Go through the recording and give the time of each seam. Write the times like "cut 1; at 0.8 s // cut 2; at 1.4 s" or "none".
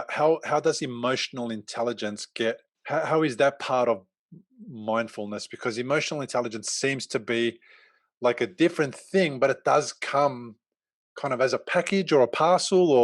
cut 1; at 2.7 s